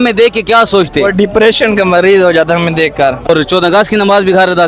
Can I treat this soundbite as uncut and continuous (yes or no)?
no